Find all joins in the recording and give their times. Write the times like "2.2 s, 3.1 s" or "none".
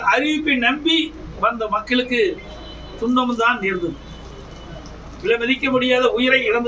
none